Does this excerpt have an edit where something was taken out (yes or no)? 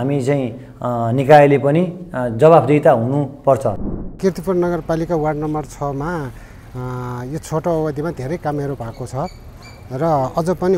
yes